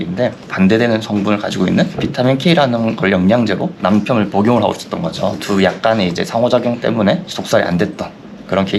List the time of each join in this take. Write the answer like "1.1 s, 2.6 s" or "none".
none